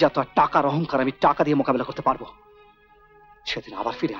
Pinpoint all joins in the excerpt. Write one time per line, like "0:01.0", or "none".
none